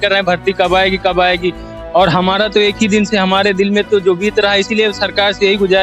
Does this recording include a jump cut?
no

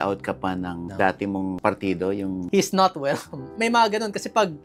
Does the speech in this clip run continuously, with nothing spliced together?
no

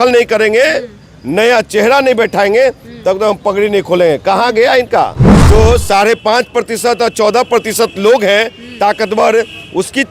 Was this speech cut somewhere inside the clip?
yes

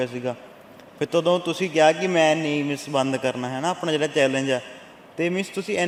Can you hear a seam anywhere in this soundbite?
no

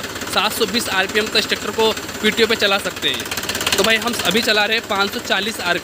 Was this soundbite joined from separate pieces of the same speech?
no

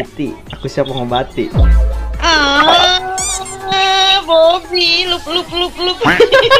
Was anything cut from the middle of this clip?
no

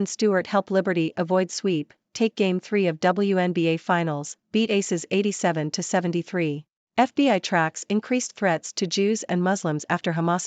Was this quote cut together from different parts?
yes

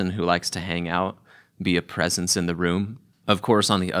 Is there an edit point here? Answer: yes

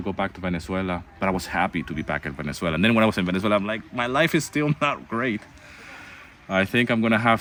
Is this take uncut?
yes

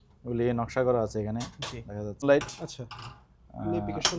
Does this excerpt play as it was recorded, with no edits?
no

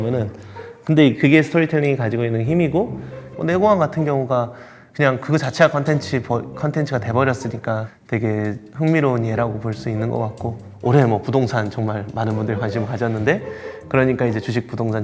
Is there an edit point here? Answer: yes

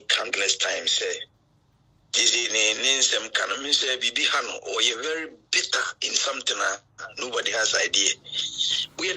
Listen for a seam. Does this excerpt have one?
no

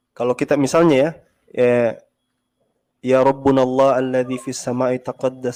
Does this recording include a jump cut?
no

